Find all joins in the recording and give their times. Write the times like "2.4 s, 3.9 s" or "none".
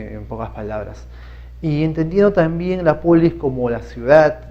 2.3 s

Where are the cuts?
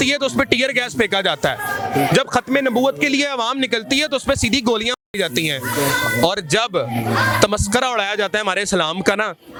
none

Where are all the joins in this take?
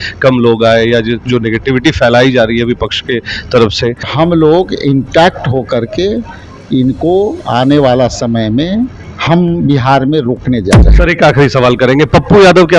4.1 s, 9.1 s

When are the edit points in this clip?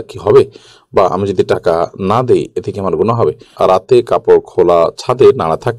3.5 s

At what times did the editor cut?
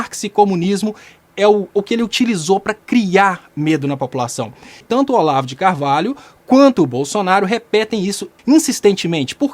4.7 s, 8.4 s

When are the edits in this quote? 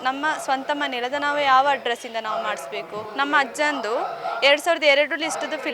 3.0 s

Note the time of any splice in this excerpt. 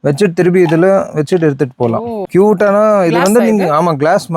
2.2 s

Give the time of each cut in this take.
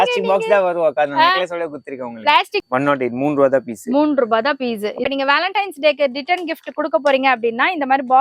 2.6 s, 5.0 s

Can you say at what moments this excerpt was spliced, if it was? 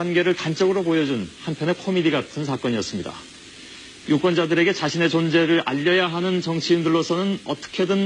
1.1 s

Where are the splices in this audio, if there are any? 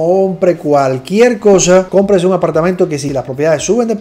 1.9 s, 3.0 s

